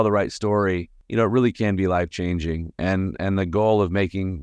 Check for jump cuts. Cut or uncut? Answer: cut